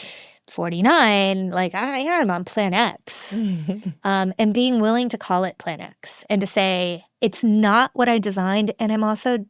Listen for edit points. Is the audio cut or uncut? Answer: uncut